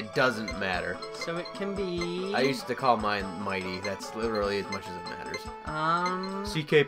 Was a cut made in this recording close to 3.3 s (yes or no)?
yes